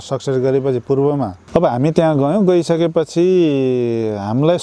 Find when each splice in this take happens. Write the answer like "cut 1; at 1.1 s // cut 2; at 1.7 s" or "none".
cut 1; at 1.4 s

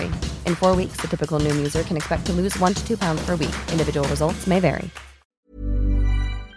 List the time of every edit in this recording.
cut 1; at 5.5 s

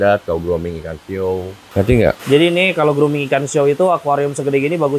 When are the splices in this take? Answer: none

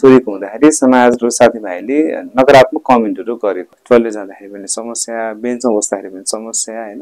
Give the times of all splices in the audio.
cut 1; at 3.7 s

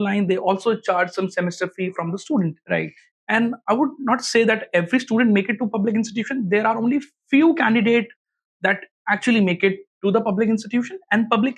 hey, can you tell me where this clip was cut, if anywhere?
none

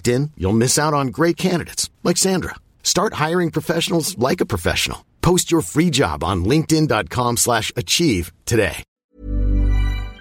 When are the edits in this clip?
cut 1; at 8.9 s

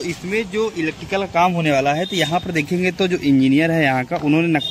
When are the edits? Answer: none

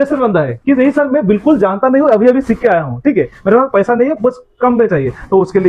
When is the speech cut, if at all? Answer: none

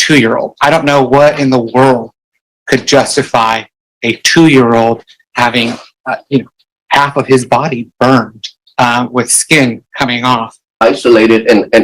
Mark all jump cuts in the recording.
cut 1; at 5.9 s // cut 2; at 10.7 s

